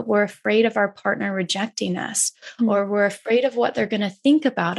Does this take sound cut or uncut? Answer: uncut